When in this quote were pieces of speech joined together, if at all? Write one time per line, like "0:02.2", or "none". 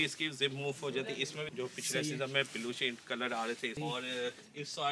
0:01.5
0:03.8